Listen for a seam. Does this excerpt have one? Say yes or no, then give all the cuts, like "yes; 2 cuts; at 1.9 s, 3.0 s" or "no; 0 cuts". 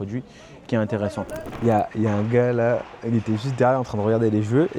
yes; 1 cut; at 1.4 s